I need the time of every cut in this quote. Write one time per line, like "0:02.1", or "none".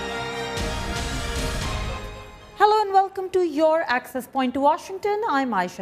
none